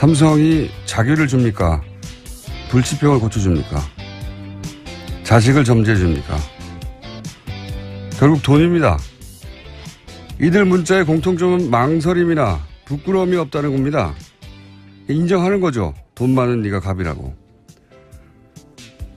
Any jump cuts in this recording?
yes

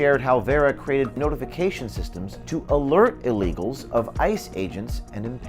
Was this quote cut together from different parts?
yes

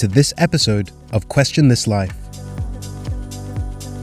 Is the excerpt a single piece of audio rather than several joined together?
no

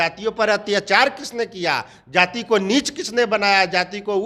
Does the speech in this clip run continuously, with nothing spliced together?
yes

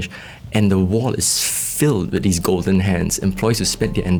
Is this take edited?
no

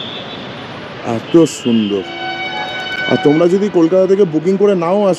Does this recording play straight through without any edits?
yes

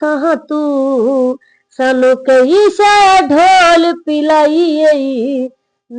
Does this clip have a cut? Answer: no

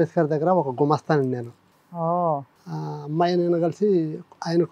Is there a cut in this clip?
yes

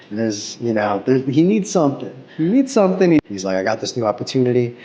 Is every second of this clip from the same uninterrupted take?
no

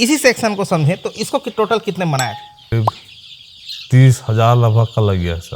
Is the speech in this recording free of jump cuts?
no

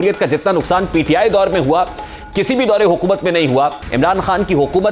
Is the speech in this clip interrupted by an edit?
yes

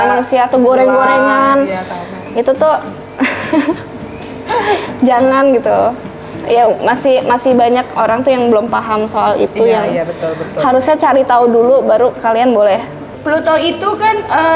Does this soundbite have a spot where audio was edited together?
yes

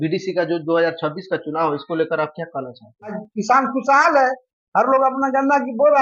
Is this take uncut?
no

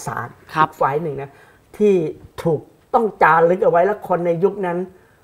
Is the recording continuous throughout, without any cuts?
yes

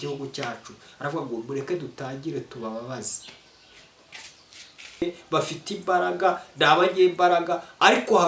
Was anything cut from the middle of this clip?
yes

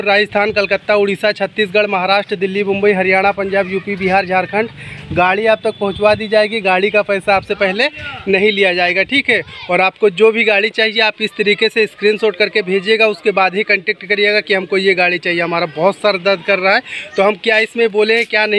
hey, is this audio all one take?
yes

